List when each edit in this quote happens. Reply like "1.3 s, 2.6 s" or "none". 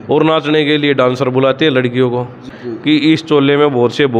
2.5 s